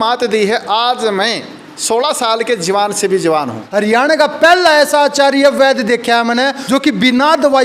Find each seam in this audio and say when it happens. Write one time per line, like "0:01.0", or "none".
0:03.6
0:06.6